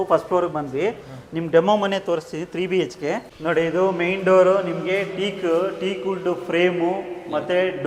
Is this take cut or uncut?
uncut